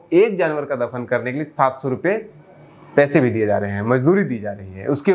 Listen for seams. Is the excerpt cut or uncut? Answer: uncut